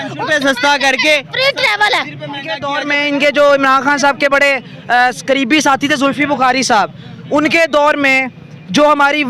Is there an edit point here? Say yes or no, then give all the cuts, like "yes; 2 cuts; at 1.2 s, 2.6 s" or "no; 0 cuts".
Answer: yes; 1 cut; at 2.7 s